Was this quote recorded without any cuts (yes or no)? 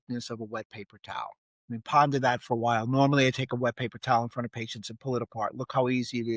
yes